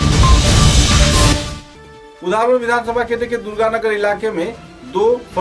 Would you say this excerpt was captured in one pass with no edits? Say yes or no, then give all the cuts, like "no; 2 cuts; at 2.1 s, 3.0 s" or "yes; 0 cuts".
yes; 0 cuts